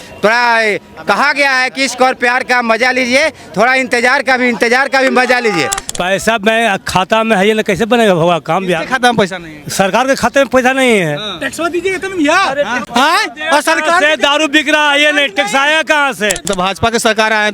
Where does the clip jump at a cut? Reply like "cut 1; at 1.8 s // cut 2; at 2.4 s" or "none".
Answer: cut 1; at 5.8 s // cut 2; at 12.8 s // cut 3; at 16.5 s